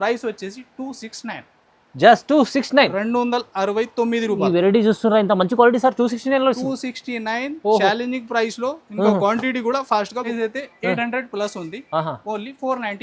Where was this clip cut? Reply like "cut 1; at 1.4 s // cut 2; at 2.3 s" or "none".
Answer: cut 1; at 10.3 s